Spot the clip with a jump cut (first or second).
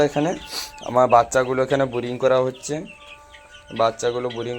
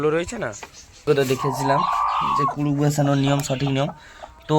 second